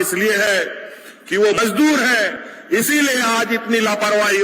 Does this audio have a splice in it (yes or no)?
yes